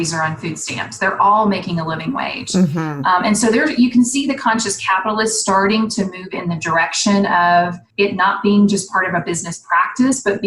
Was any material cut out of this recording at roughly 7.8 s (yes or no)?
yes